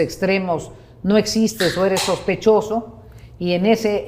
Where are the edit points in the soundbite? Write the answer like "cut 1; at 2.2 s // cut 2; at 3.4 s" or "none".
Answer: none